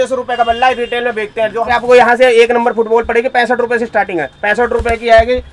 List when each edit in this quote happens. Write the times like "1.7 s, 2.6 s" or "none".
1.7 s